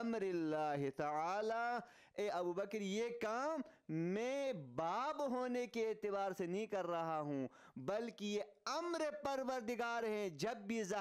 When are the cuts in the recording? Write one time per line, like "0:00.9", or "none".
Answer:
none